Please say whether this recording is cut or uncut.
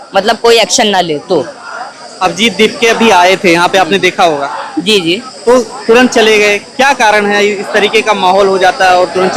uncut